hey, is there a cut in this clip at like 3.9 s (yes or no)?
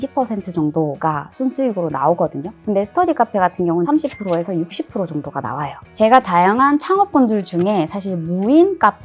yes